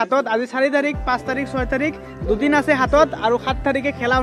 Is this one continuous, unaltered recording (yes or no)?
yes